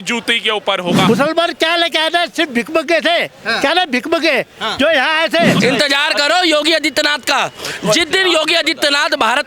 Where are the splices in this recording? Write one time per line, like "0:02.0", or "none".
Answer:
0:01.1
0:05.6